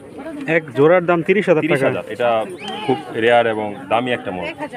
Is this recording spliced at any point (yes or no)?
no